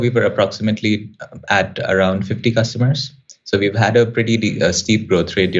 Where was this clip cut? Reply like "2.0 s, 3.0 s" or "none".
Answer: none